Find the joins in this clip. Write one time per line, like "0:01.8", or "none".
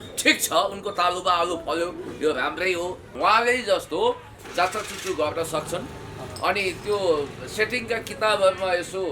0:03.0